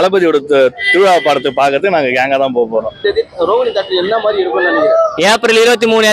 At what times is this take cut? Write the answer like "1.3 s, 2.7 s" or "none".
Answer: 3.0 s

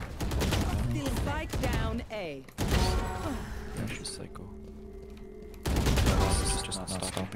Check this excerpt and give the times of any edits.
none

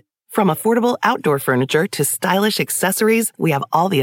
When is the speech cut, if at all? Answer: none

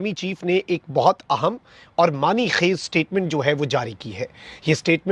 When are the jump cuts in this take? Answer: none

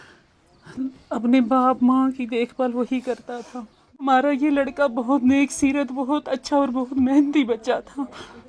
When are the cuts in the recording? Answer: 4.1 s

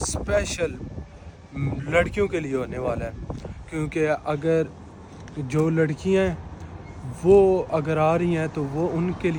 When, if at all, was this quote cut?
none

